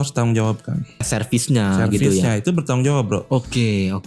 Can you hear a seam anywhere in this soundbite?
yes; 1 cut; at 1.0 s

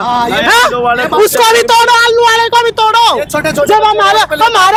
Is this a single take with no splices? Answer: yes; 0 cuts

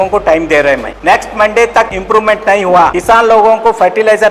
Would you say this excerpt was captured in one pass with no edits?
no; 3 cuts; at 0.9 s, 2.0 s, 3.0 s

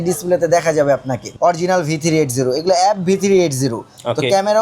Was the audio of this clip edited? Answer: yes; 1 cut; at 1.2 s

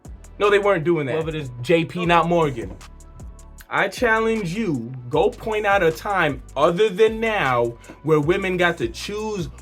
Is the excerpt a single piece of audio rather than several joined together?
no; 1 cut; at 1.5 s

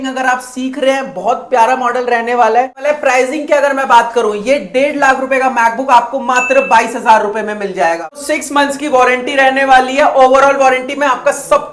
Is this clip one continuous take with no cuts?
no; 2 cuts; at 2.8 s, 8.2 s

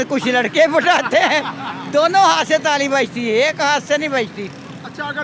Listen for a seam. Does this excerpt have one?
no; 0 cuts

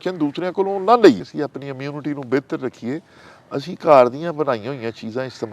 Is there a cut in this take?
yes; 1 cut; at 1.2 s

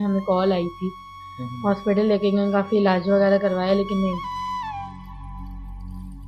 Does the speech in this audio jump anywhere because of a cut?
no; 0 cuts

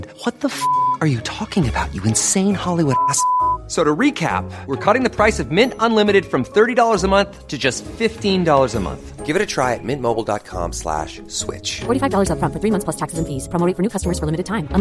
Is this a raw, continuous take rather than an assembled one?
yes; 0 cuts

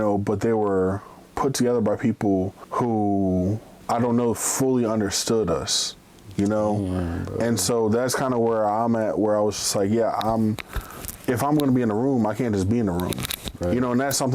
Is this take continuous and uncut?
no; 2 cuts; at 2.6 s, 3.7 s

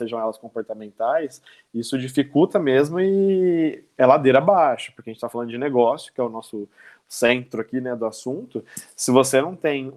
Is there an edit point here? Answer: no; 0 cuts

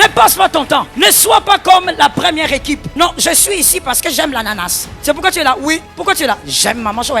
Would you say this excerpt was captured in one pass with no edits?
no; 4 cuts; at 0.9 s, 2.9 s, 4.8 s, 5.9 s

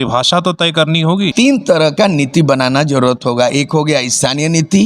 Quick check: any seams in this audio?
yes; 1 cut; at 1.3 s

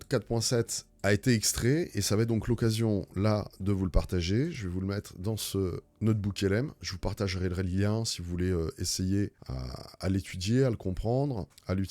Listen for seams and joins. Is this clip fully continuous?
yes; 0 cuts

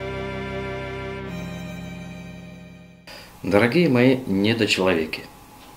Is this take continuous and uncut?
yes; 0 cuts

